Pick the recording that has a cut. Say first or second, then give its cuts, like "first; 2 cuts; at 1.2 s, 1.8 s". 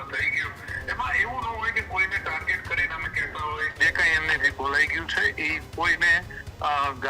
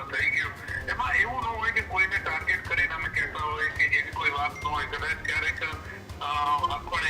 first; 1 cut; at 3.7 s